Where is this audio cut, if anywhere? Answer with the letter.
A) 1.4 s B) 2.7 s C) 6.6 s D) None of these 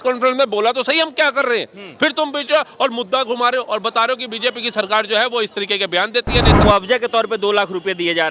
C